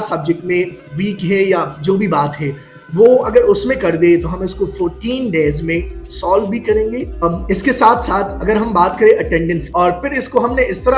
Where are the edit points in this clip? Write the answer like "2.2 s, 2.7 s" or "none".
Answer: 7.2 s, 9.6 s